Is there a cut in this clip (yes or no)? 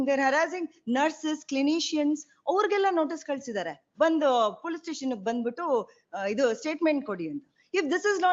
no